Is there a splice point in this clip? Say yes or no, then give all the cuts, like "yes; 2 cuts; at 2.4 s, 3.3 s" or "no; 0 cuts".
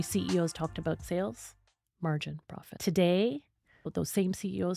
yes; 3 cuts; at 1.0 s, 2.6 s, 3.9 s